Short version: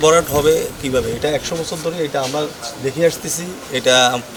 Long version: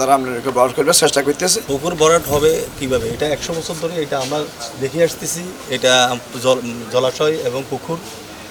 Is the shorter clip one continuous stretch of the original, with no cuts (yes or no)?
yes